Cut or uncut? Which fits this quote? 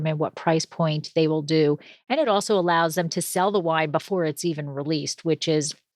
uncut